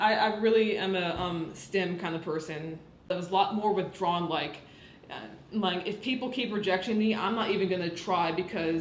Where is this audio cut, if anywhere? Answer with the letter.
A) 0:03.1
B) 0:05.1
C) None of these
A